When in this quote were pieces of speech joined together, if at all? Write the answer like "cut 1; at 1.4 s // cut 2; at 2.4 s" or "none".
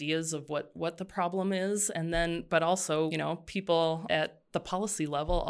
cut 1; at 3.1 s